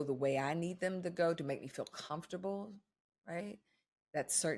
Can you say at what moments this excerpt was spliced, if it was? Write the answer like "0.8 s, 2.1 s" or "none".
none